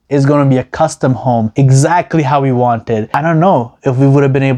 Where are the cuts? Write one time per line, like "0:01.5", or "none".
none